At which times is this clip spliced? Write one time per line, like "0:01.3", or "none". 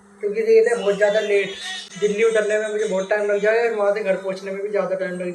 none